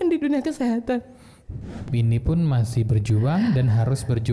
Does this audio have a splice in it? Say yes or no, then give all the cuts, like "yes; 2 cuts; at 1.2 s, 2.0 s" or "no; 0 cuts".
yes; 1 cut; at 1.9 s